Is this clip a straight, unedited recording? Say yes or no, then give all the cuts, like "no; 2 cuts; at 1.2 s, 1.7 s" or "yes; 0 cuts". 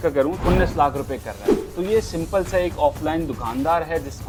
yes; 0 cuts